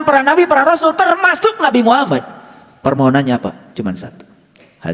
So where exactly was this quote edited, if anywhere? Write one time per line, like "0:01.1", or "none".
none